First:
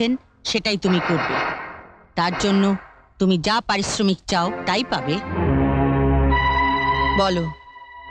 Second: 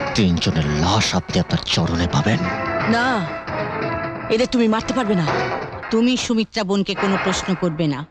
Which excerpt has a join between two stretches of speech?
second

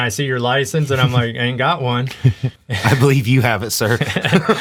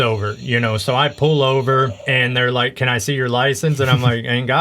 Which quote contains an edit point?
second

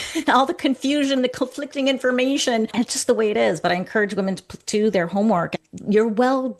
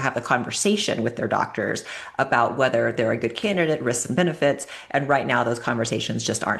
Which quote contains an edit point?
first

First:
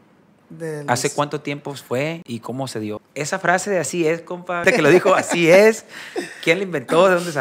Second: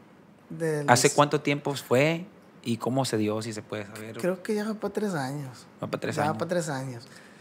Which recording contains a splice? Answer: first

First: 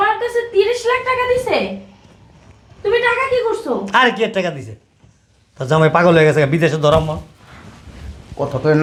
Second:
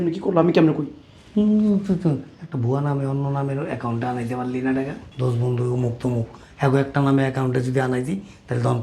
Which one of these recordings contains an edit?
second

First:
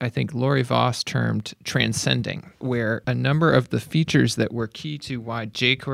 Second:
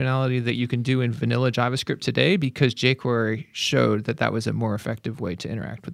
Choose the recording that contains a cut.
first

